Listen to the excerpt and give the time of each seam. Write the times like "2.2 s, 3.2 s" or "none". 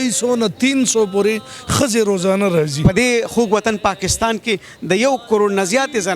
2.8 s

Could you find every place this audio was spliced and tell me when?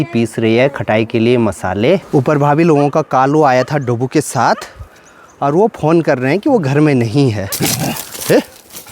2.0 s, 7.5 s

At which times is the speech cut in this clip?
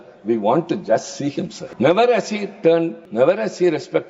1.6 s, 3.0 s

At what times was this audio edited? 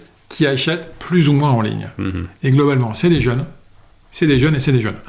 none

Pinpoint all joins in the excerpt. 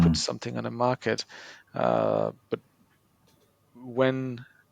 none

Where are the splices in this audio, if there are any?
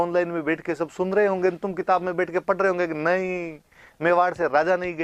none

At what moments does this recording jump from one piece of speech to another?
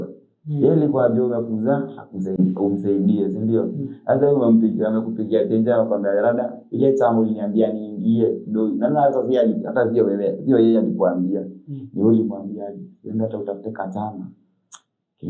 none

